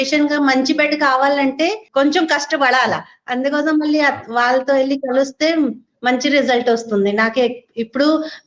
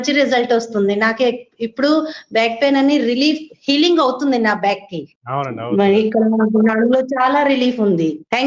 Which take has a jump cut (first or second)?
first